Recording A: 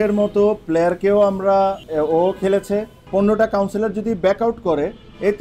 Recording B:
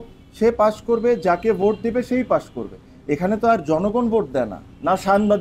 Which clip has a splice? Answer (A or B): A